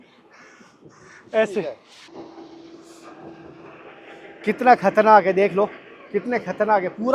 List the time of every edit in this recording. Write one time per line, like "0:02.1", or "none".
0:01.9